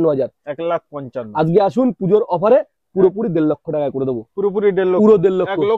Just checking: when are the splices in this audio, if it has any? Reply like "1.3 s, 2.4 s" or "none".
none